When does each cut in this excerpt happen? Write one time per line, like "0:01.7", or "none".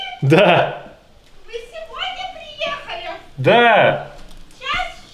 none